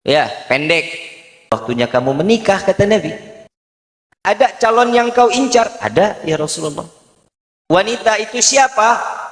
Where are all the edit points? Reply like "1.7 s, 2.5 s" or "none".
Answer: 1.5 s